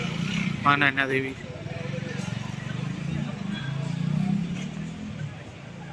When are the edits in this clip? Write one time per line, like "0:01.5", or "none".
none